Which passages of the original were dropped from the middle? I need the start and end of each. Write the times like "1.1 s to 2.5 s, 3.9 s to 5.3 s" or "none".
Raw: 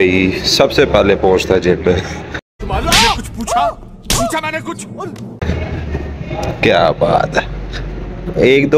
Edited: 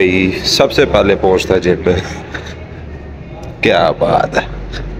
2.5 s to 5.5 s